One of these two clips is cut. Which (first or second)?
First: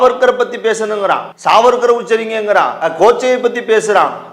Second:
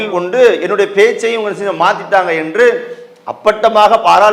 first